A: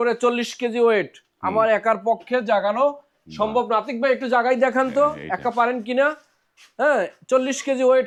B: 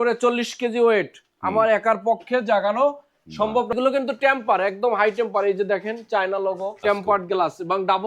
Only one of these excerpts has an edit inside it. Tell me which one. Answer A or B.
B